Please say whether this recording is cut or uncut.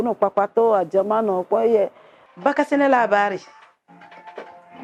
uncut